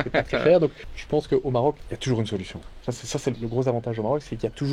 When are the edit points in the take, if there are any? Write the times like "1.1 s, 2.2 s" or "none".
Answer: 0.8 s, 1.9 s, 3.4 s